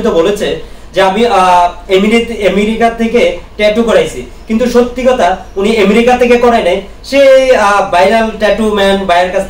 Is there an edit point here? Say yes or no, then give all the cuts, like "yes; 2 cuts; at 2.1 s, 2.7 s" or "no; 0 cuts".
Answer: no; 0 cuts